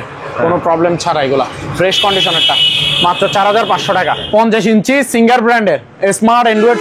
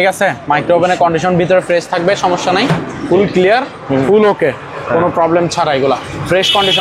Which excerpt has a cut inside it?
first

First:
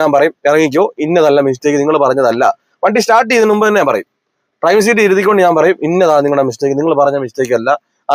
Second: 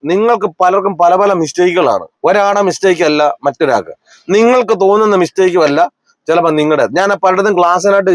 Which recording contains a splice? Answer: second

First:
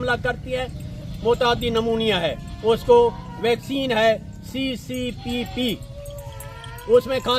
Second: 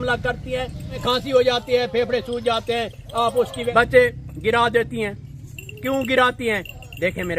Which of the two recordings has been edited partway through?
second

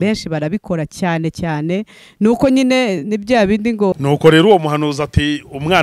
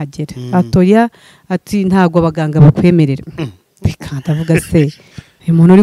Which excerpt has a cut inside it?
first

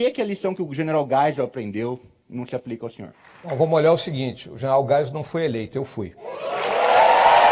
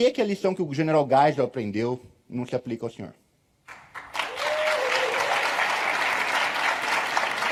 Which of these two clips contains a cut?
first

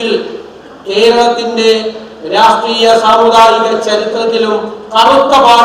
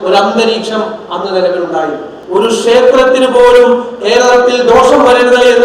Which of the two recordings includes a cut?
second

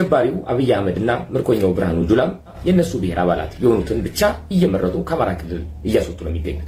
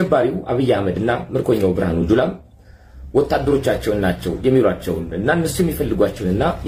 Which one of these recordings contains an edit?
first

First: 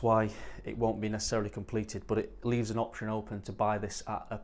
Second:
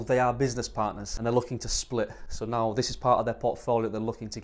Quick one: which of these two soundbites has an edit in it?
second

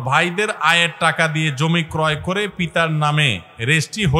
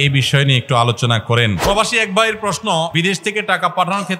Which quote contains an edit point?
second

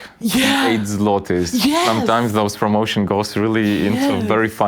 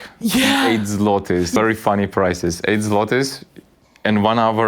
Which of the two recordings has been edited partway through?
second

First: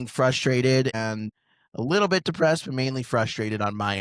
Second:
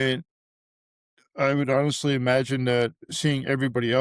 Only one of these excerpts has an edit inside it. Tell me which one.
first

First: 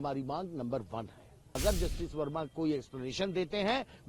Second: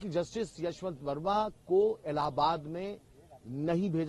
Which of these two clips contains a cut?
first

